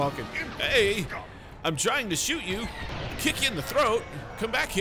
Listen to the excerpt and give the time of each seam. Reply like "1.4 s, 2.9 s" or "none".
2.9 s